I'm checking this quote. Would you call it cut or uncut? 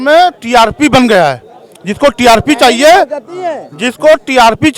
uncut